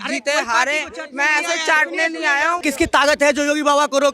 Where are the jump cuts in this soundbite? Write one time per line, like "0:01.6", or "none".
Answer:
0:02.6